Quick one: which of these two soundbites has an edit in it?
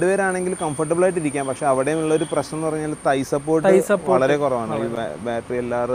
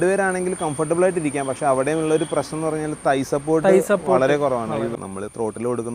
second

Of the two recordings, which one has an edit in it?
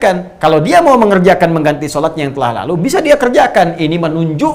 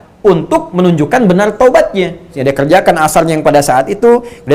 second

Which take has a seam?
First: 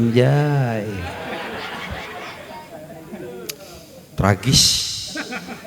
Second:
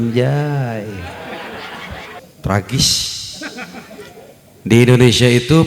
second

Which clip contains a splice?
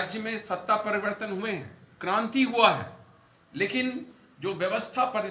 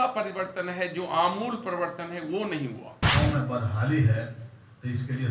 second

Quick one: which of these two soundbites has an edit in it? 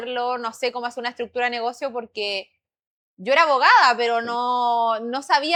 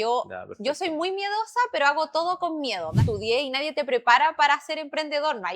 second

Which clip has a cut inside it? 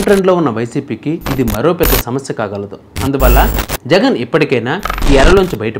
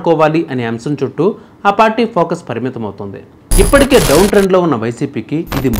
second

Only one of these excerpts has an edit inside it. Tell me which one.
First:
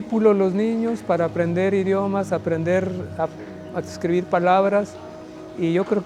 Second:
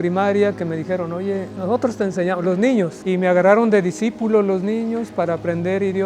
second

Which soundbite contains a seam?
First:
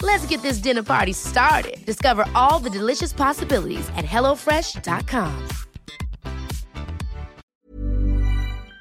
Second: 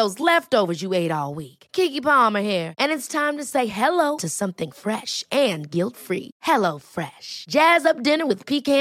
first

